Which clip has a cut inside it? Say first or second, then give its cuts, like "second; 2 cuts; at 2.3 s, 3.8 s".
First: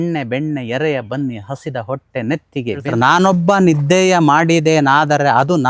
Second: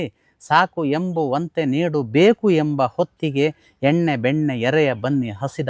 first; 1 cut; at 2.9 s